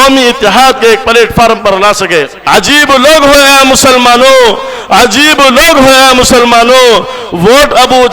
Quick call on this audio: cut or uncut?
cut